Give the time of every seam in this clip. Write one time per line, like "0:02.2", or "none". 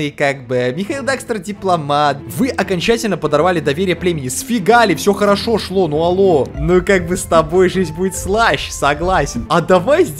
0:02.2
0:06.5
0:09.4

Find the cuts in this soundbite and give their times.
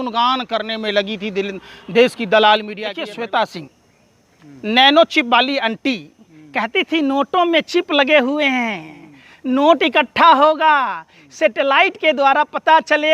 0:02.8

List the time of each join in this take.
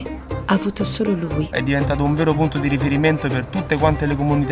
0:01.6

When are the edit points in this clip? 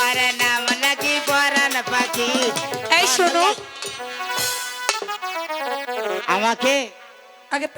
none

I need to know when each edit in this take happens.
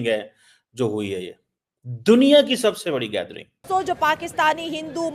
0:03.6

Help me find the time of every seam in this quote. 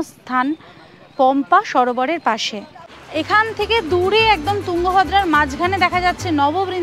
0:03.1

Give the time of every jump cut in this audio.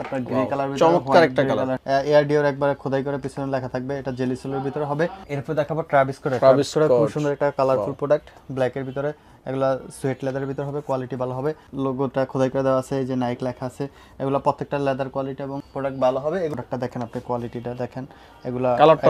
0:01.8
0:05.2
0:11.6
0:16.5

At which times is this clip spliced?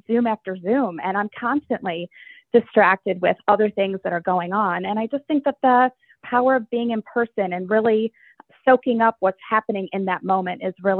none

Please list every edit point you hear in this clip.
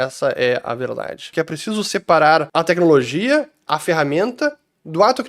0:01.3
0:02.5

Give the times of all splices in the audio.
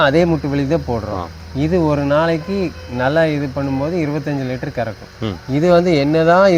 none

